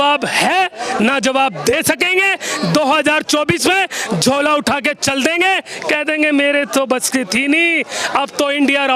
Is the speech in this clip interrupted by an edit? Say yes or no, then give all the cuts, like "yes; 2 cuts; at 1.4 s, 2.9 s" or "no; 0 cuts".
no; 0 cuts